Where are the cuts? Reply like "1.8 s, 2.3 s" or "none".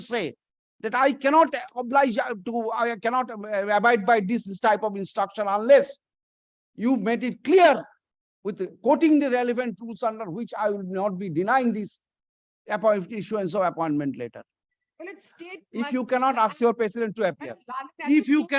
none